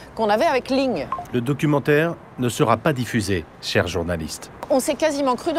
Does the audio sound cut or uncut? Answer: cut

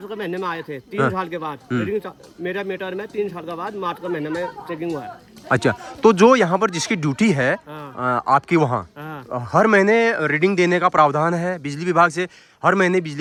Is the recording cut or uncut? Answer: uncut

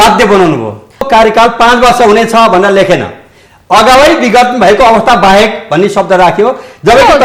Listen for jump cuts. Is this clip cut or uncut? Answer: cut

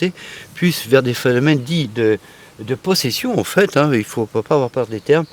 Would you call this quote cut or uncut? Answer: uncut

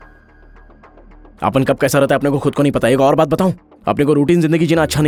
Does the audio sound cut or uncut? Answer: uncut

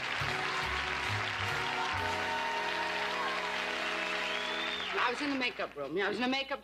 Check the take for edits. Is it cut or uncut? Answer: cut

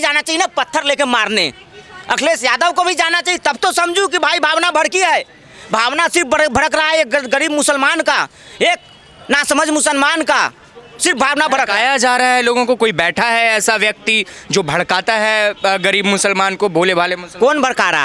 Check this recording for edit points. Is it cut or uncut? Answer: uncut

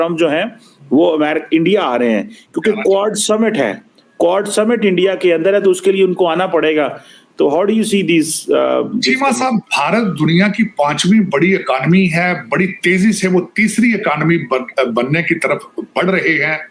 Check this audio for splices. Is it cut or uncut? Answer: uncut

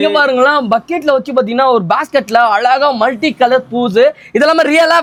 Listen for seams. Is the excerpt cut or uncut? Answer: uncut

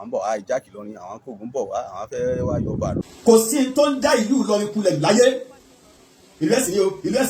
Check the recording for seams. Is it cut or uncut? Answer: cut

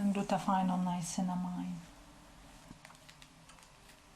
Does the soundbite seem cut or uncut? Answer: cut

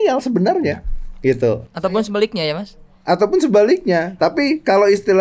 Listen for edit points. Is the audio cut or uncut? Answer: cut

